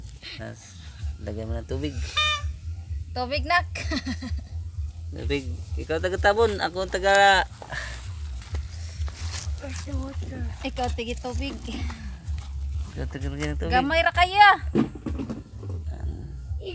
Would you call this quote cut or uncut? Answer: uncut